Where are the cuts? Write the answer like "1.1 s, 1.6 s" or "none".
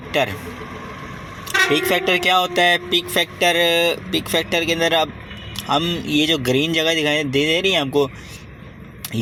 none